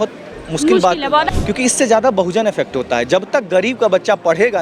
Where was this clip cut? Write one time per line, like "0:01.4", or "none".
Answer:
0:01.3